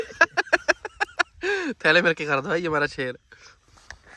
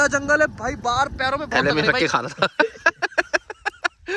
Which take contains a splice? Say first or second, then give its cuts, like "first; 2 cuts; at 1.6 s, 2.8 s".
second; 1 cut; at 1.6 s